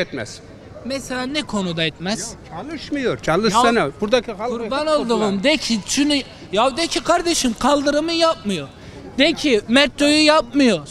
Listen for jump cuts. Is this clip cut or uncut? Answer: uncut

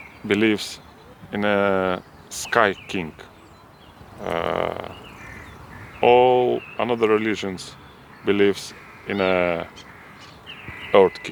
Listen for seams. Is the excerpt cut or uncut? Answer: uncut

